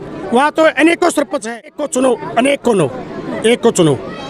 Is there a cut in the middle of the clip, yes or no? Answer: yes